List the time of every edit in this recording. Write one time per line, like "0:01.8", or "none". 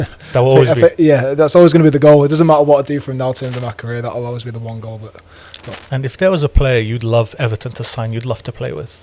0:05.8

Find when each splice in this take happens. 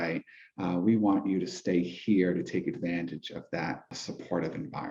0:04.0

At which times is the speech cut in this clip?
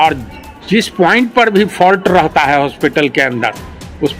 none

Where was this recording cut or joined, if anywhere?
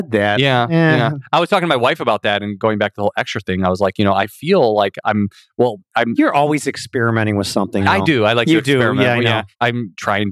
0:07.8

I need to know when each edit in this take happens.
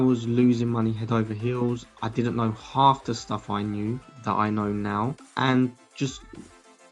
0:04.1
0:05.2

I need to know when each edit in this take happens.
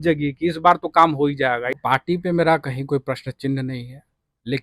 0:01.7

